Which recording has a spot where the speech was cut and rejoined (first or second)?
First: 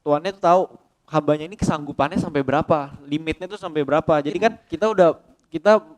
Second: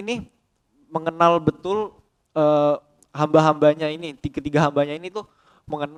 first